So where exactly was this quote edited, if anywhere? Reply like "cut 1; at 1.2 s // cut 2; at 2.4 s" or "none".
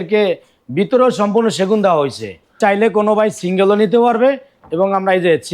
cut 1; at 2.6 s